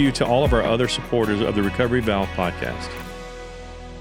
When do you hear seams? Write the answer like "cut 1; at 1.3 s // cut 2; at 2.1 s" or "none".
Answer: cut 1; at 2.8 s